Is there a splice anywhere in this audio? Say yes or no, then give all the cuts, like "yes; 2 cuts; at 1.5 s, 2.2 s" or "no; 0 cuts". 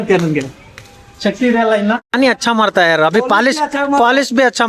yes; 1 cut; at 2.1 s